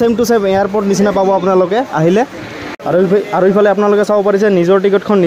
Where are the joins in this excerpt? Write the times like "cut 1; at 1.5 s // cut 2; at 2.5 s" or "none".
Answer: none